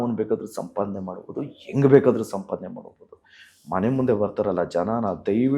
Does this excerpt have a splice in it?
no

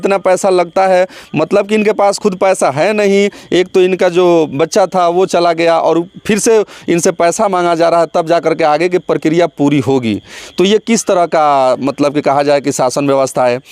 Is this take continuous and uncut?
yes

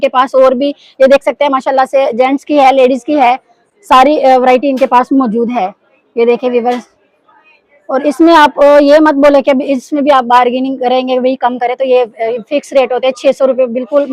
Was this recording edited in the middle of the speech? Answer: no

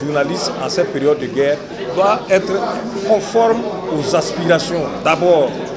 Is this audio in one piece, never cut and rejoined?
yes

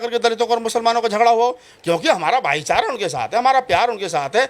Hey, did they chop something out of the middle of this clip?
no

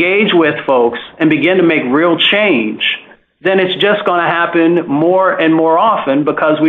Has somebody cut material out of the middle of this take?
no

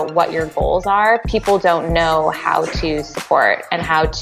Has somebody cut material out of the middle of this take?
no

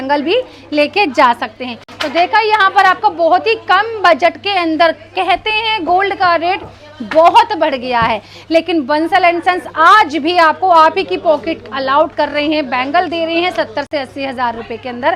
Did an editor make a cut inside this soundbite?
no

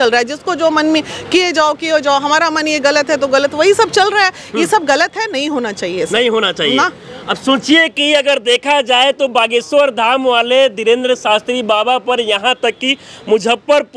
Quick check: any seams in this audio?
no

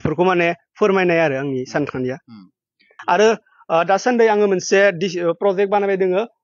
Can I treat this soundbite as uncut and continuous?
no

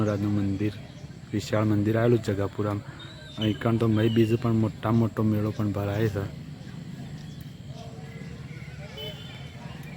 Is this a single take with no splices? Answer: yes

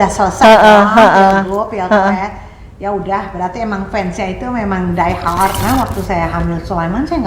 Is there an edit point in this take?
yes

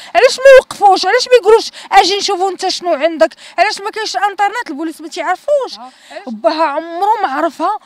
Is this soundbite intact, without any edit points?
no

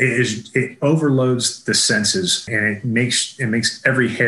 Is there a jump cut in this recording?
yes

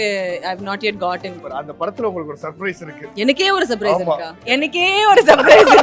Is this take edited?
yes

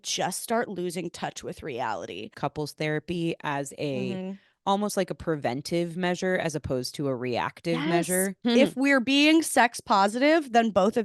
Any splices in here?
yes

